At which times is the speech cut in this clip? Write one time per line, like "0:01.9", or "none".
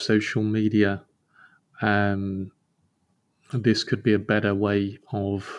none